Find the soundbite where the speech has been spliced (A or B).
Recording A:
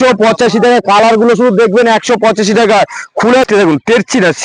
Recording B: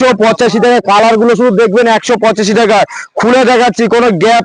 A